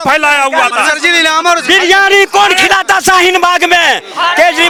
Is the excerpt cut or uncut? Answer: uncut